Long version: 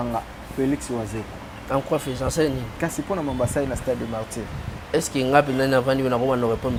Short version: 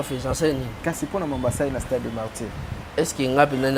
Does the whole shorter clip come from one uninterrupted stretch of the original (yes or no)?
yes